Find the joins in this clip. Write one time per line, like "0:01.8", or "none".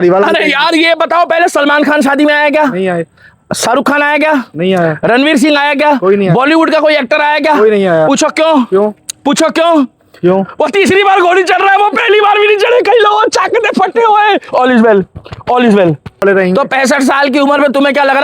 0:16.2